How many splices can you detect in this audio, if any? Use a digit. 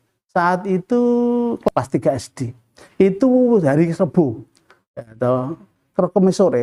0